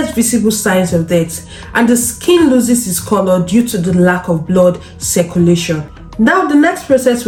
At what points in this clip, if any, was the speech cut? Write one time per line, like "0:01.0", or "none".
none